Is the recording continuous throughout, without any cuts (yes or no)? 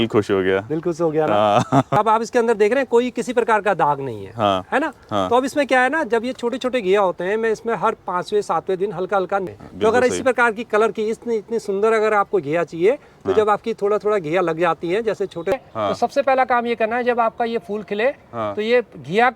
no